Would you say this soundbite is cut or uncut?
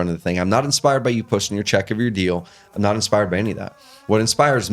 uncut